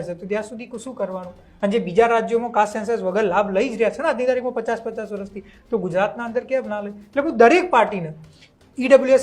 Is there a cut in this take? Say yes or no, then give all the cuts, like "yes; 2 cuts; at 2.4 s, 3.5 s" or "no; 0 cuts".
no; 0 cuts